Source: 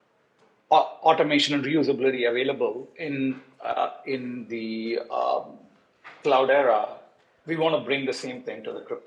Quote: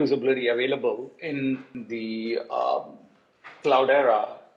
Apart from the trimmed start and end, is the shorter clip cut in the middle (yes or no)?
yes